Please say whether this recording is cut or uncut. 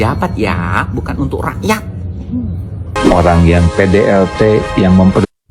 cut